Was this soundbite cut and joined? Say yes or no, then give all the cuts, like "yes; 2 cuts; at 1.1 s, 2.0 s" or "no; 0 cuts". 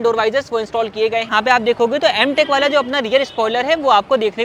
yes; 1 cut; at 1.3 s